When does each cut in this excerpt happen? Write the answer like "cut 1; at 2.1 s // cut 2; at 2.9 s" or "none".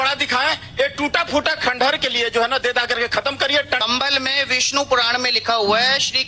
cut 1; at 3.8 s